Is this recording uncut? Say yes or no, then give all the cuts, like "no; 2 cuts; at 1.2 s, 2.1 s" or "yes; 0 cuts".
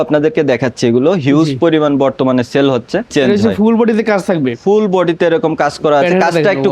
no; 1 cut; at 3.1 s